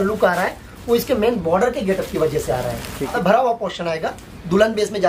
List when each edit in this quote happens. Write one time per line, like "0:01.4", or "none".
0:03.1